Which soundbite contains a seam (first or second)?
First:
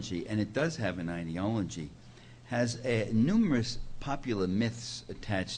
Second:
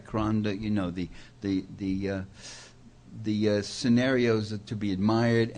first